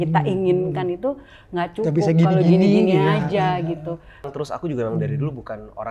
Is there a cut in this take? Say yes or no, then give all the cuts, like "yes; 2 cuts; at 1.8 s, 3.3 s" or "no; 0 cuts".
yes; 1 cut; at 4.3 s